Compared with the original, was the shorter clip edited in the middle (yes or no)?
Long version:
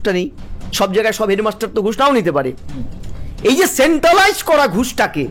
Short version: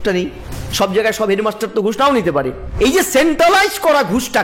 yes